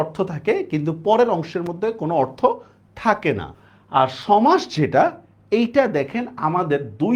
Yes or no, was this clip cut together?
yes